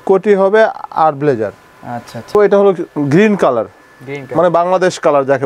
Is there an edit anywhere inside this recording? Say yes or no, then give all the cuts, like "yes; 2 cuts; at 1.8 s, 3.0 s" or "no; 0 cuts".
yes; 1 cut; at 2.3 s